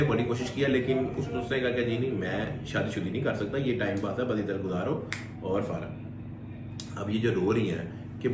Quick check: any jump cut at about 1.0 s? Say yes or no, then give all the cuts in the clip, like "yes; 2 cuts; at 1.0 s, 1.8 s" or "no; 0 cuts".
no; 0 cuts